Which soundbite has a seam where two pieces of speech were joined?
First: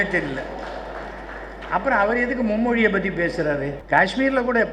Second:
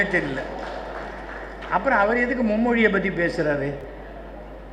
first; 1 cut; at 3.8 s

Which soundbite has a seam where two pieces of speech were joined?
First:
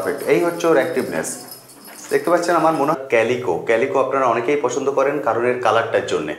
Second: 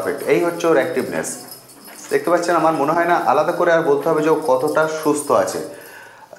first; 1 cut; at 2.9 s

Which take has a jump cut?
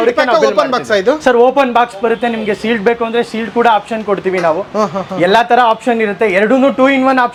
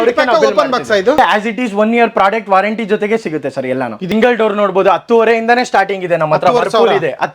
second; 2 cuts; at 1.2 s, 4.0 s

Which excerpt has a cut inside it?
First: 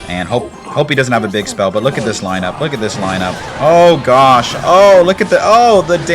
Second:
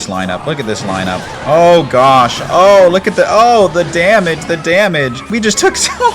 second; 1 cut; at 5.2 s

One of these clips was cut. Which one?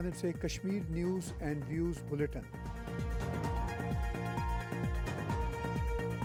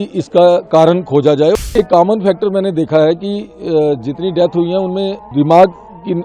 second; 2 cuts; at 1.5 s, 5.2 s

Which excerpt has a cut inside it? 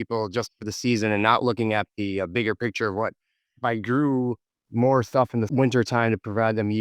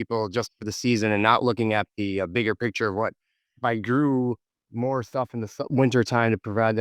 first; 1 cut; at 5.5 s

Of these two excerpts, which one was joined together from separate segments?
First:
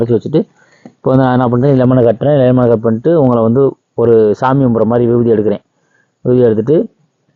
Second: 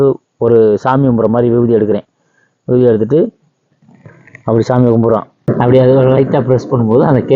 second; 1 cut; at 5.5 s

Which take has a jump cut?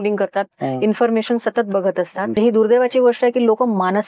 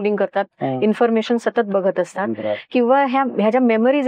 first; 1 cut; at 2.3 s

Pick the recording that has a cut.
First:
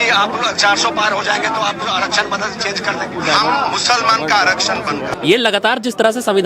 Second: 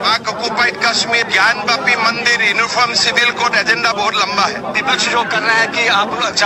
first; 1 cut; at 5.0 s

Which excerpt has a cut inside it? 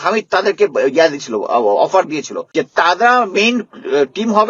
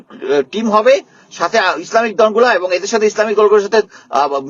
first; 1 cut; at 2.4 s

